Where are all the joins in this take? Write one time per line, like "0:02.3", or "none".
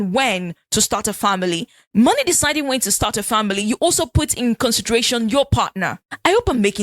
none